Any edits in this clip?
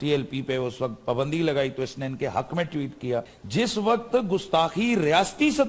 yes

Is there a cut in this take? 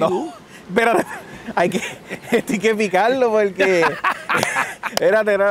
no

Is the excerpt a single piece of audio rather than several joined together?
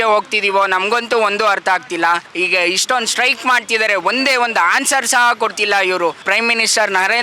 no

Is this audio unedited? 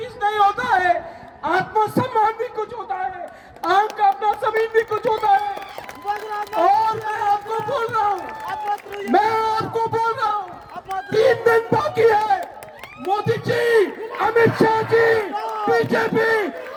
yes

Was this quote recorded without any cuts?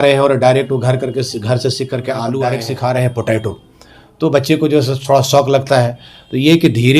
no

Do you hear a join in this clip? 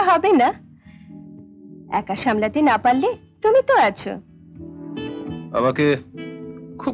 no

